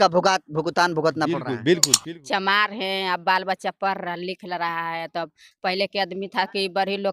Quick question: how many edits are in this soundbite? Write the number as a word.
one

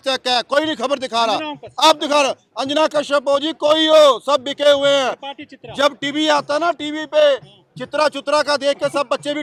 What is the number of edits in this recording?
zero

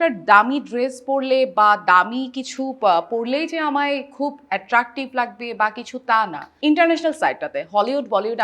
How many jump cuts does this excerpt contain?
one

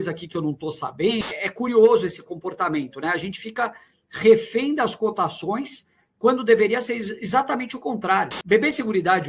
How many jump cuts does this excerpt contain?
two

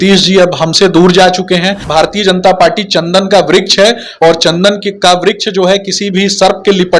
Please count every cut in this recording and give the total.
one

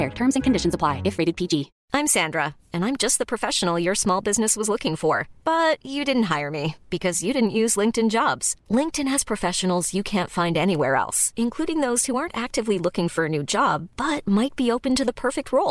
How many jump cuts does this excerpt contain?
one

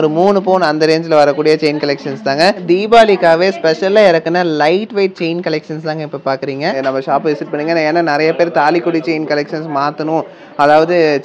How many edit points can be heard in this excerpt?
two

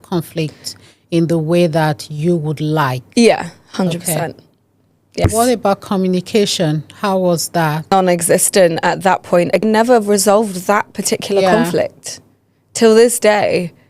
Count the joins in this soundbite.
three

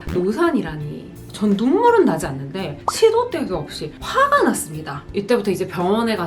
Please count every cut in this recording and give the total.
two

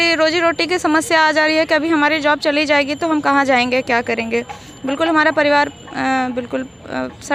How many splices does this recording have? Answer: zero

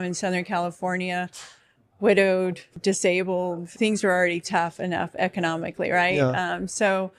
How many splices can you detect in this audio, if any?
two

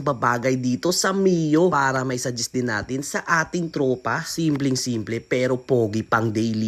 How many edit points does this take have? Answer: zero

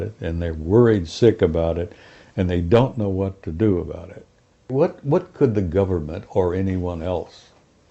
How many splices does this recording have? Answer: one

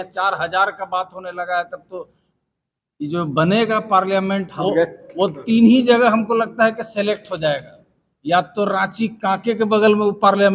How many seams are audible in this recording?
zero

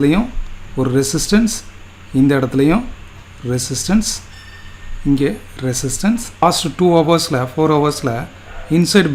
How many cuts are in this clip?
one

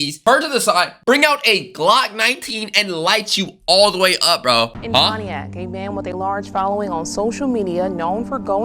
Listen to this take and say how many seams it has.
one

